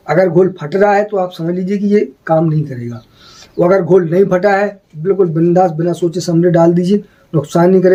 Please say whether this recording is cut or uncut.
uncut